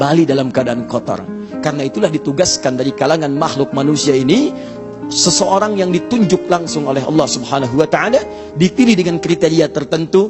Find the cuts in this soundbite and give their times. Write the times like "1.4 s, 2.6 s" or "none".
none

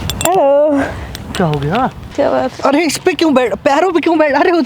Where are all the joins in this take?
2.0 s

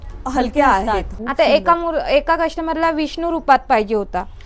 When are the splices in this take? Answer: 1.1 s

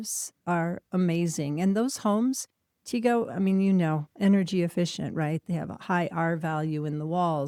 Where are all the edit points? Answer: none

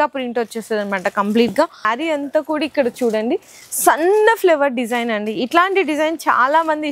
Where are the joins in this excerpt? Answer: 1.9 s

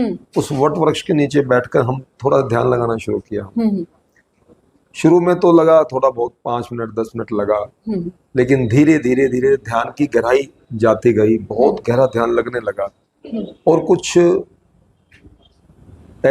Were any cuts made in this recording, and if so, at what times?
none

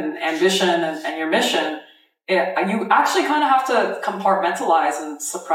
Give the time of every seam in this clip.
none

